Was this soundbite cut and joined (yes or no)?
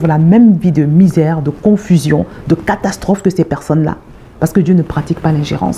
no